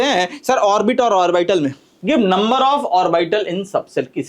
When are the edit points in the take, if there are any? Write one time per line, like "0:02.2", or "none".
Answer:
0:01.9